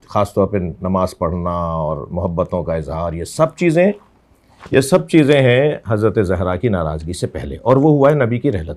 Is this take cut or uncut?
uncut